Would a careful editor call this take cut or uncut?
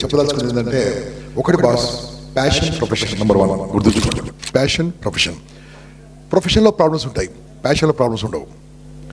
uncut